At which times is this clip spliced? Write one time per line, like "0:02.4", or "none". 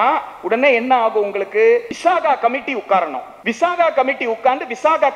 0:01.9
0:03.3